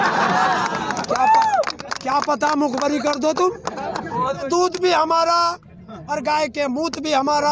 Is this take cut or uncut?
cut